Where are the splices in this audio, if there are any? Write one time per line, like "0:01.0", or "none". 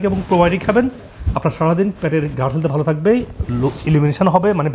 none